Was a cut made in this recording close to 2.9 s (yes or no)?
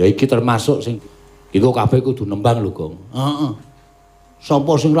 no